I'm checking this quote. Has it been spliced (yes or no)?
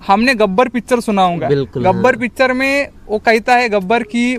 no